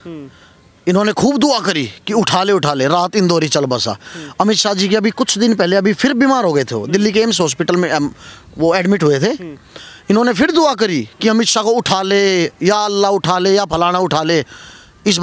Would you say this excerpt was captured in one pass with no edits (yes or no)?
yes